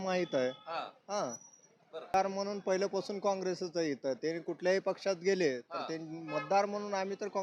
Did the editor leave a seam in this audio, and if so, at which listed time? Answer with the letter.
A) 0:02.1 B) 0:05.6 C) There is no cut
A